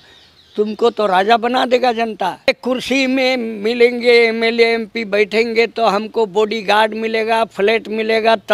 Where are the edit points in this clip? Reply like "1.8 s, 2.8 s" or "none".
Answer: 2.5 s